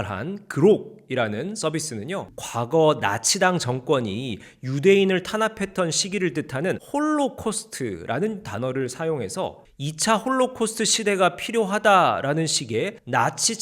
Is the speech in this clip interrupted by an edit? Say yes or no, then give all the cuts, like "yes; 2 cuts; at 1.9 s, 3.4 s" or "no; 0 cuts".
yes; 2 cuts; at 2.3 s, 9.7 s